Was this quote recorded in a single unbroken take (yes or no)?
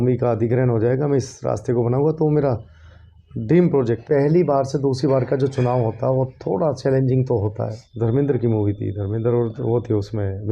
no